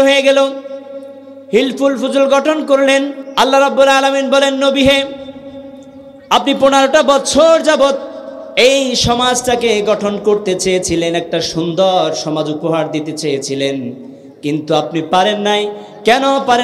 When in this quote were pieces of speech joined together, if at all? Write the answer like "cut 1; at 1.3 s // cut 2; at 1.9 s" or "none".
cut 1; at 3.2 s